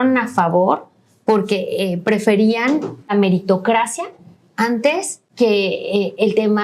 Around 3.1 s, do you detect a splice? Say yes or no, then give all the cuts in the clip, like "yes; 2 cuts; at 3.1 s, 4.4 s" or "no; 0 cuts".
yes; 2 cuts; at 3.1 s, 5.2 s